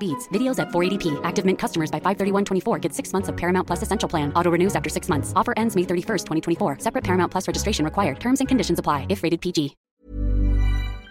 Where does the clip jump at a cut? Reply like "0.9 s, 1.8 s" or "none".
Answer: 9.9 s